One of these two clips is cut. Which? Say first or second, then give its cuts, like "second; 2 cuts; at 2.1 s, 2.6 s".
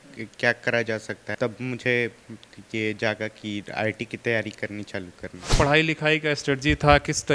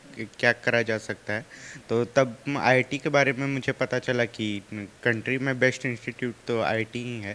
first; 2 cuts; at 1.3 s, 5.5 s